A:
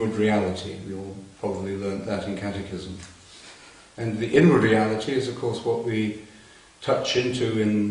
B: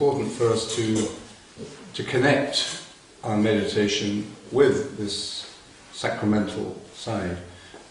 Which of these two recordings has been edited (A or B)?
B